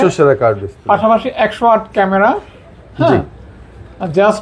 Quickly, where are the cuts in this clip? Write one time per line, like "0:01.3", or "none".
none